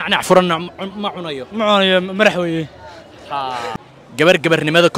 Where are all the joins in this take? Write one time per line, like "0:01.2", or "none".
0:03.7